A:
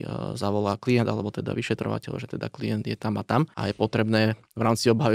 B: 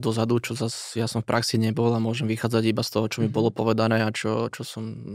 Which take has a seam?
A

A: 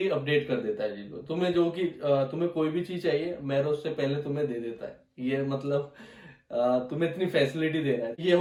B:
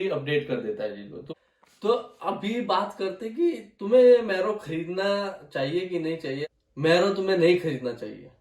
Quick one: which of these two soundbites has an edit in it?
B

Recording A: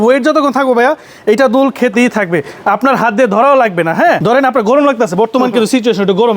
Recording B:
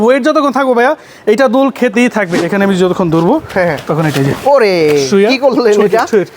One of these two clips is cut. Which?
B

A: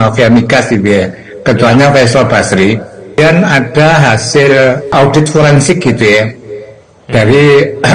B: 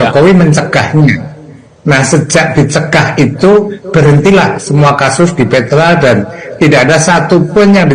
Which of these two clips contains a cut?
A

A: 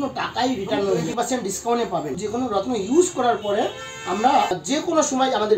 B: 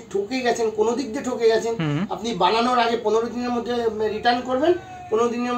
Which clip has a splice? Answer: A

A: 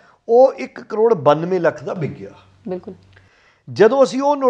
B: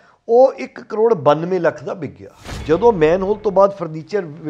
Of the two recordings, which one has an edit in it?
B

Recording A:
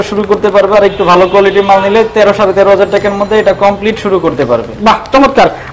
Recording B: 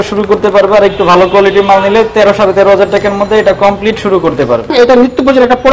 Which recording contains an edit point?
B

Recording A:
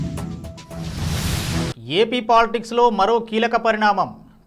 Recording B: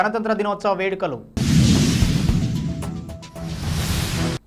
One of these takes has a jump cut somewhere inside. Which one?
A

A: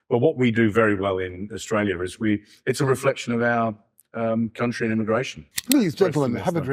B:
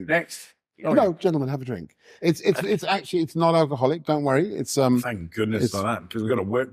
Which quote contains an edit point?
A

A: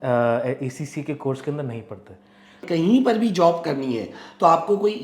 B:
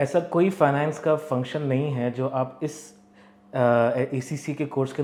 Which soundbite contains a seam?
A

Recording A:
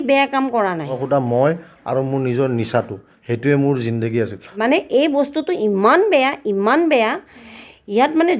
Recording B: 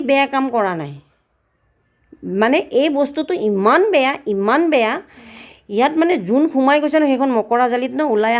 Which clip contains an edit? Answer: A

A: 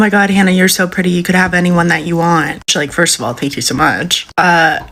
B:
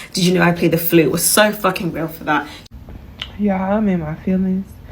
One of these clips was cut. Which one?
B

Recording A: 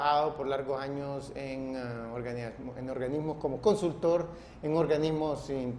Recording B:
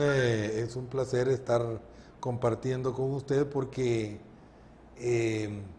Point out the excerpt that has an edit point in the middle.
A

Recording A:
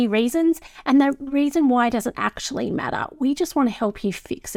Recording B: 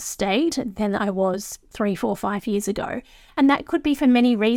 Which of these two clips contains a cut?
B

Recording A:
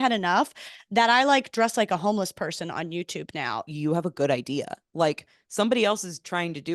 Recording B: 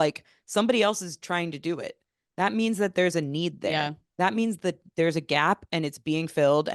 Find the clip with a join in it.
A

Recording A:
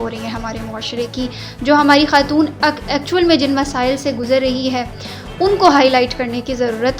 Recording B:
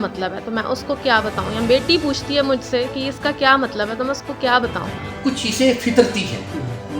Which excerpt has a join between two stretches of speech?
B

